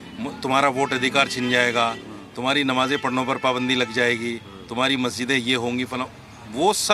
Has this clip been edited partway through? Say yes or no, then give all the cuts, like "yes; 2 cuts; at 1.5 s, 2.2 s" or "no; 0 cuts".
no; 0 cuts